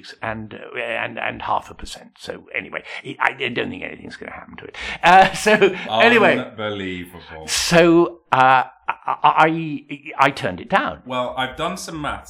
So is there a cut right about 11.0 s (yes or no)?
yes